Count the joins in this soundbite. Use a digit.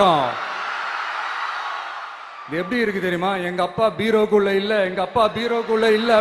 1